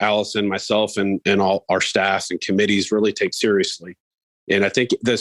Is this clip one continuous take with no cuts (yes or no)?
no